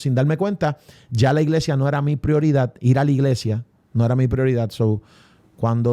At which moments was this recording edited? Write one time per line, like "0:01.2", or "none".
none